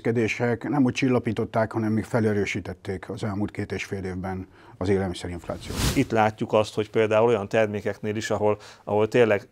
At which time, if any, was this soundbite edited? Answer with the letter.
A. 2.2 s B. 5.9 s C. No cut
B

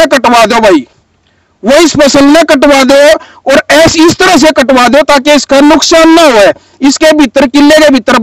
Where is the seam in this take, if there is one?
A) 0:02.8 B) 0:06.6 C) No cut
C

